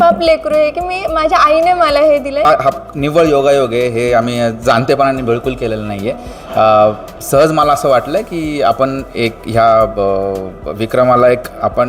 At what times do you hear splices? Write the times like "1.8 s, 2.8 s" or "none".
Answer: 2.4 s